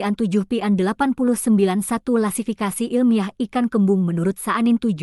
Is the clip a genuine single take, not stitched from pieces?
yes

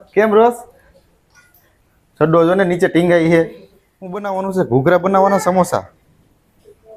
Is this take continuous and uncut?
no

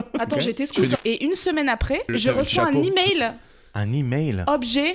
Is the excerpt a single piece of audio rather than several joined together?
no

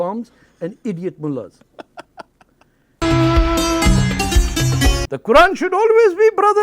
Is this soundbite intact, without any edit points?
no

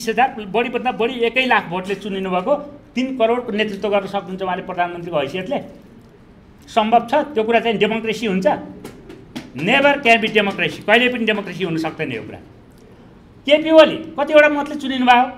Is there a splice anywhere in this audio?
no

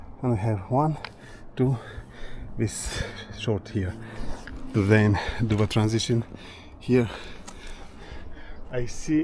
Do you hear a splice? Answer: no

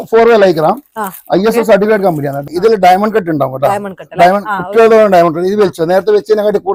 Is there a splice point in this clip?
no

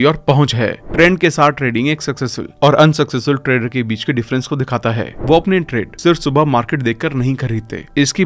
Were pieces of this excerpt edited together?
yes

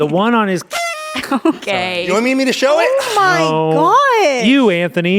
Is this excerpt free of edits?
yes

